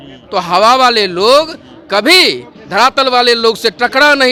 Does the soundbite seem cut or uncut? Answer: uncut